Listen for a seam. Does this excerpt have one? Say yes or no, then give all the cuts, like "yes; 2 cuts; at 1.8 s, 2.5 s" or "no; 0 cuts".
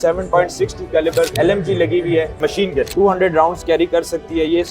yes; 2 cuts; at 1.3 s, 2.9 s